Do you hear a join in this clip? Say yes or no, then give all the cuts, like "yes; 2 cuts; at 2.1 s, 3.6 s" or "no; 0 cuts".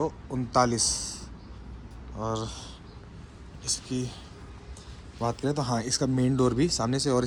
no; 0 cuts